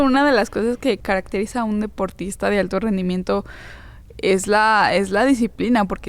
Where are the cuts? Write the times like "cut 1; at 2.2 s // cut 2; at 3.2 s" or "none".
cut 1; at 1.0 s